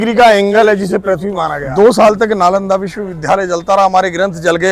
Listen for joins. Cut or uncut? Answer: cut